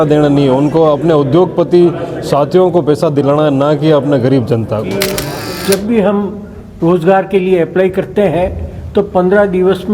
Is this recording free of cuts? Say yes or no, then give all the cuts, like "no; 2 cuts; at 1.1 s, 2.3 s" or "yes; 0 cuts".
no; 1 cut; at 5.2 s